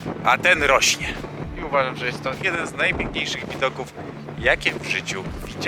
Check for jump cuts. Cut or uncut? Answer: cut